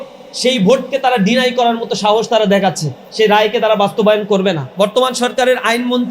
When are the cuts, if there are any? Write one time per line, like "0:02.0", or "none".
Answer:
0:03.0
0:04.6